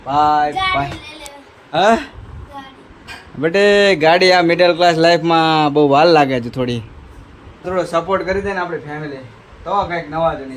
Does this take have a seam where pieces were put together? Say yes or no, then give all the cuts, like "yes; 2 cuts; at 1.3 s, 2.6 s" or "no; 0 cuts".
yes; 1 cut; at 7.6 s